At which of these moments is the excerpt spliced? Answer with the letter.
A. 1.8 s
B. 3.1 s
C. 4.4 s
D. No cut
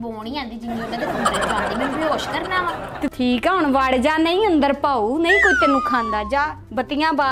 B